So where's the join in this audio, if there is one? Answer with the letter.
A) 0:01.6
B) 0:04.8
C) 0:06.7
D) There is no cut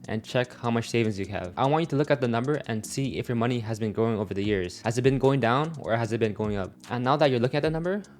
C